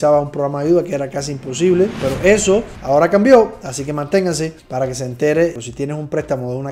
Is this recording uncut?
no; 2 cuts; at 2.0 s, 5.6 s

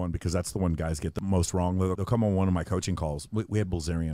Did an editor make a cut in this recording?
yes; 2 cuts; at 1.2 s, 2.0 s

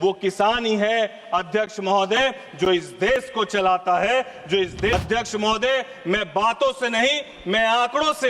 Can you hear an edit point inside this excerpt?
yes; 1 cut; at 4.9 s

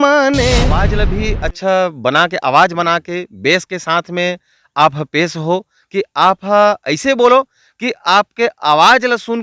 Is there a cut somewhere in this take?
yes; 1 cut; at 1.0 s

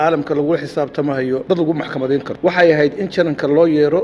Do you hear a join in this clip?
yes; 2 cuts; at 1.4 s, 2.3 s

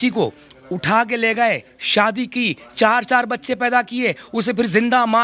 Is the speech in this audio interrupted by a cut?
no; 0 cuts

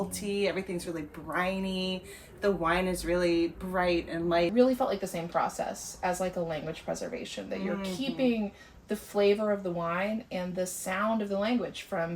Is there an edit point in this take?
yes; 1 cut; at 4.5 s

